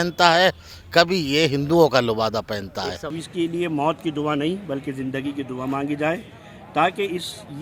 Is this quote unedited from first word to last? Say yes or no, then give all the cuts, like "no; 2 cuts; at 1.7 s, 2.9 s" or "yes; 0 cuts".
no; 1 cut; at 3.1 s